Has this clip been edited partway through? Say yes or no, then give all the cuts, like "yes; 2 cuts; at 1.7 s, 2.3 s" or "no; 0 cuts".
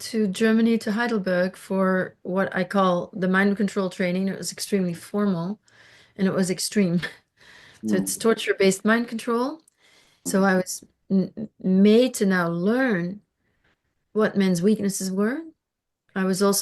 yes; 1 cut; at 10.2 s